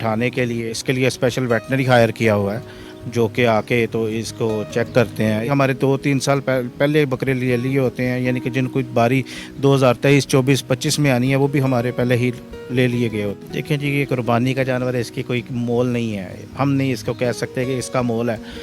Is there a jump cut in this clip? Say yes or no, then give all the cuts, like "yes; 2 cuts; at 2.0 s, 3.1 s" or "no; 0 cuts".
yes; 3 cuts; at 0.8 s, 5.5 s, 13.5 s